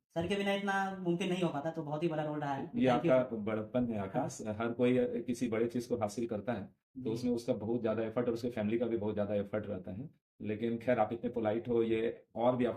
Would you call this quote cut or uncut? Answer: uncut